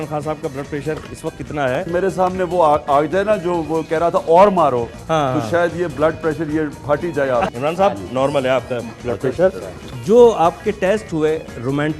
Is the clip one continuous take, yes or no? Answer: no